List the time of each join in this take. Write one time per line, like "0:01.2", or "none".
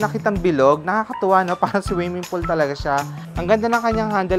0:03.2